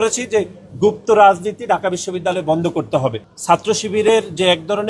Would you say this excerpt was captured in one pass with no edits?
no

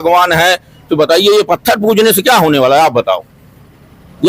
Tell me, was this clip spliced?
no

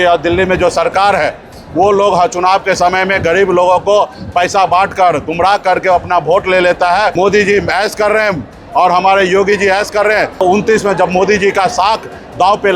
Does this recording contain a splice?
yes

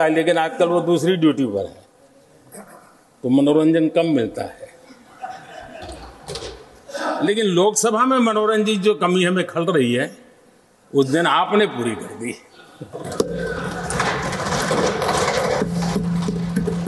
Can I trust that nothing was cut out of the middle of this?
yes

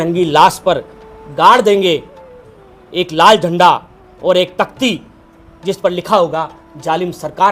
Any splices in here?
no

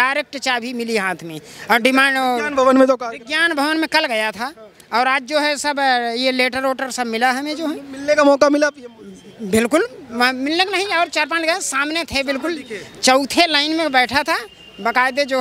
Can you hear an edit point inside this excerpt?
no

